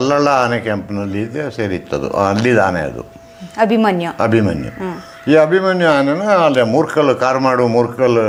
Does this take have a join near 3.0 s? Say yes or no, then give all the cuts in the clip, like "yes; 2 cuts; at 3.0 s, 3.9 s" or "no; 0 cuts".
no; 0 cuts